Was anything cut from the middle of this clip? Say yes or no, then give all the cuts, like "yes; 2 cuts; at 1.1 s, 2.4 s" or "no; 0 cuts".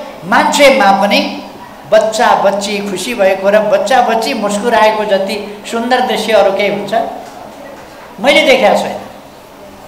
no; 0 cuts